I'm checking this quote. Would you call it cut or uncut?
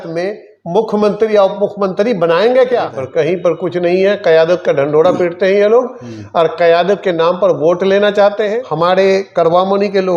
cut